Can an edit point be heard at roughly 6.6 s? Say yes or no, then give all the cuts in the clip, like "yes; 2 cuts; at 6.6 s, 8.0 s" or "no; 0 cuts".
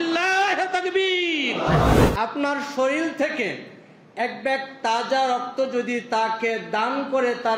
no; 1 cut; at 1.9 s